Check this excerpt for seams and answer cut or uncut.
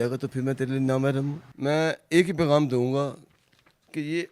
cut